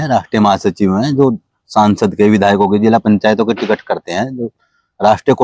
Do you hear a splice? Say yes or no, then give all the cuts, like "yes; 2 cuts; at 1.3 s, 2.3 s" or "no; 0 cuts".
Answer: no; 0 cuts